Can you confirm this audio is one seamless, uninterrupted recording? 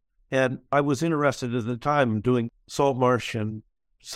yes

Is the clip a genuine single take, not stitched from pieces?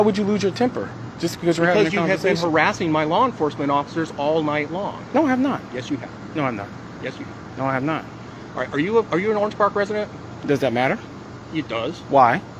yes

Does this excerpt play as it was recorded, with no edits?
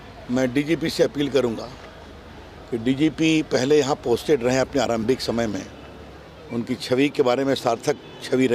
yes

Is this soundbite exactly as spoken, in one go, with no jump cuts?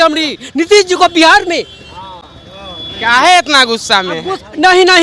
yes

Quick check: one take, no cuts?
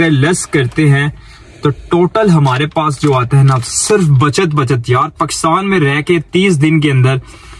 yes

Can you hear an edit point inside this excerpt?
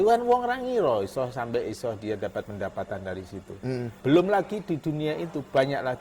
yes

